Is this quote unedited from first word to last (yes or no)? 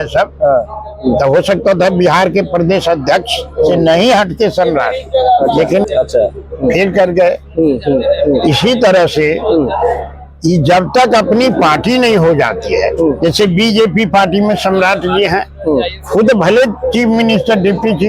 no